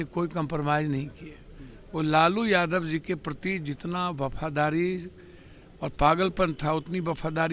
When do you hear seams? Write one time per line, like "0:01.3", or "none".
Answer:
none

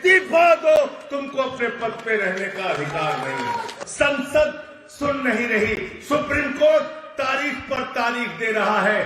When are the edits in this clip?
0:03.8

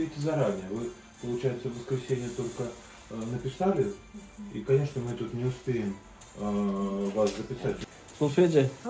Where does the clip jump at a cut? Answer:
0:07.8

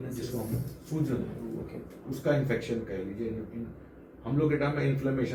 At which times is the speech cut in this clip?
none

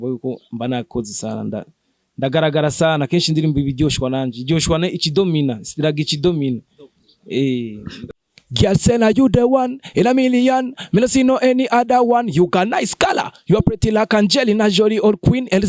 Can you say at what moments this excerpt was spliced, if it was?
0:08.2

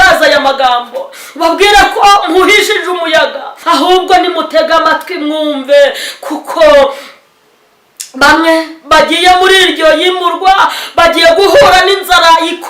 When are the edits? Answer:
0:03.5

